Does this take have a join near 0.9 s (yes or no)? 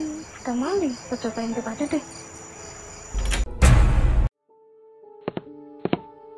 no